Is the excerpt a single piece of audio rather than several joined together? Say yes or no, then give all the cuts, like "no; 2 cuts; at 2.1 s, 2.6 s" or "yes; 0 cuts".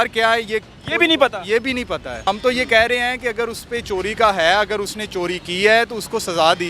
no; 1 cut; at 2.3 s